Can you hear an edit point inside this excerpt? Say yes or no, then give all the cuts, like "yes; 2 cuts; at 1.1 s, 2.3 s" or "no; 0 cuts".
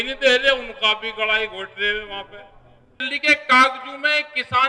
yes; 1 cut; at 3.1 s